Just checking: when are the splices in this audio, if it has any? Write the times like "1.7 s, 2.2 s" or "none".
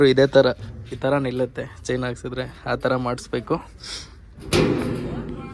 none